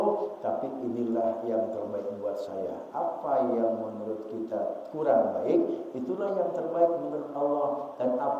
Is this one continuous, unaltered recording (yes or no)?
yes